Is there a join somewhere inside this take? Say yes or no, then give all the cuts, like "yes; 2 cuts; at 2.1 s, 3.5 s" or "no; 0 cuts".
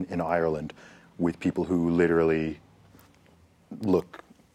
no; 0 cuts